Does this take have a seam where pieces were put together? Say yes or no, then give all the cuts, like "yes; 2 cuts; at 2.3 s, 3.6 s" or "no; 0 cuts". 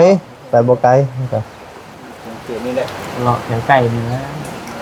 no; 0 cuts